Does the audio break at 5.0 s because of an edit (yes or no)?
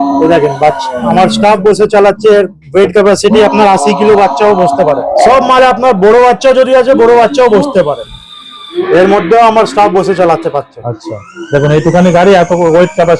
yes